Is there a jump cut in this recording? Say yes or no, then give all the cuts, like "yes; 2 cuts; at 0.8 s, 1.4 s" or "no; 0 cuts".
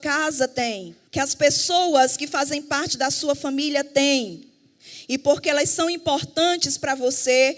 yes; 1 cut; at 0.9 s